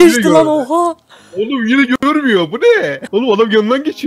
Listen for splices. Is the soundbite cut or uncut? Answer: cut